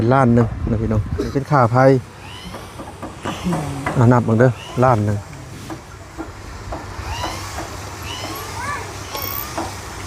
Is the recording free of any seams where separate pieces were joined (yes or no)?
no